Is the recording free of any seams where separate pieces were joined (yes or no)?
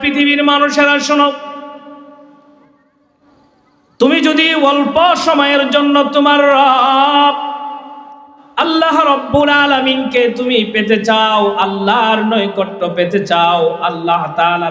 yes